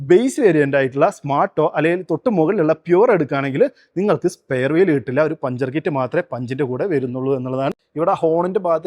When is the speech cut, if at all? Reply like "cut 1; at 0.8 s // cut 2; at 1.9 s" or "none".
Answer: cut 1; at 7.8 s